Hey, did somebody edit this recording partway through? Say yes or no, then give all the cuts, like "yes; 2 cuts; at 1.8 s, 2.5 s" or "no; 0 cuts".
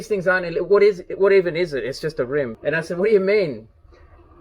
yes; 1 cut; at 2.5 s